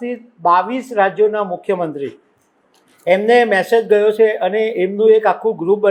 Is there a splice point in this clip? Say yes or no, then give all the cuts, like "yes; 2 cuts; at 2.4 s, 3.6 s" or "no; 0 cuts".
no; 0 cuts